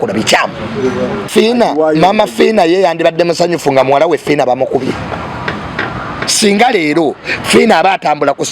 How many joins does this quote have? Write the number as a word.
one